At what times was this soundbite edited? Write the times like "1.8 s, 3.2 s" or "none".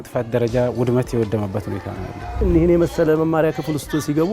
2.2 s

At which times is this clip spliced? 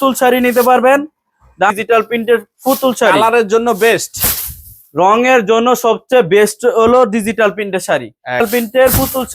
1.7 s, 8.4 s

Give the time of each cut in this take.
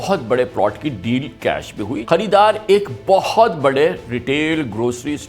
2.0 s

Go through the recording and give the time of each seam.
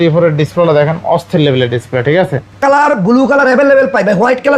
2.6 s

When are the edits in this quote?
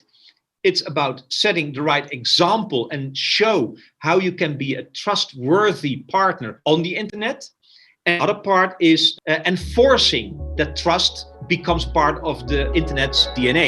9.1 s, 11.4 s, 12.7 s

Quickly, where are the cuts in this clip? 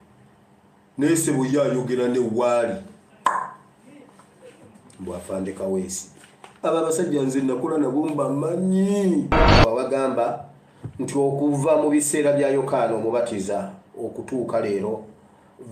9.6 s

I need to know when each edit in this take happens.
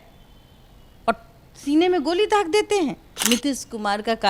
3.1 s

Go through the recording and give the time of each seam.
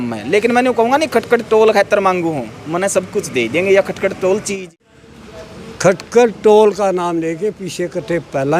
4.6 s

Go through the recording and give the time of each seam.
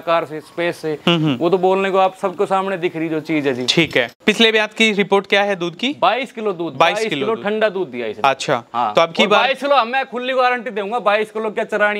1.0 s, 4.1 s

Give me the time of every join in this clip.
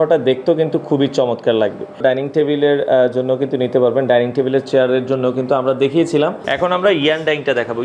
2.0 s, 6.4 s

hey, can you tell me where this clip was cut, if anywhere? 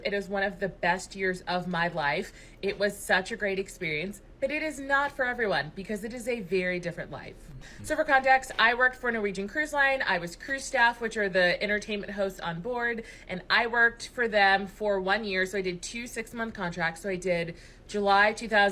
none

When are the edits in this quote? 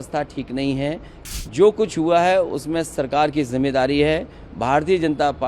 1.1 s

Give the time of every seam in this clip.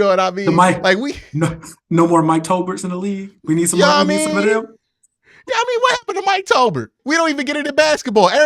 7.0 s

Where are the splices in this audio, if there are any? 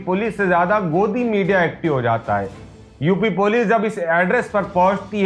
2.8 s

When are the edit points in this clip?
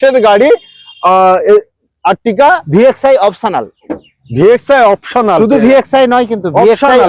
none

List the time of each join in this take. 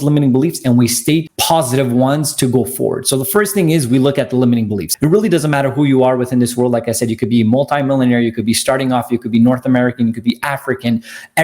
1.3 s, 4.8 s

